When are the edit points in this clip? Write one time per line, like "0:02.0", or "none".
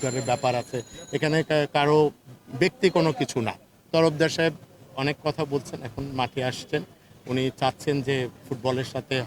0:03.8